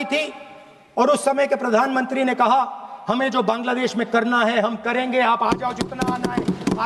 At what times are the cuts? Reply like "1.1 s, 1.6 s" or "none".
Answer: none